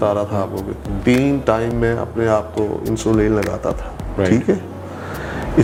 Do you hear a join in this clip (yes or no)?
no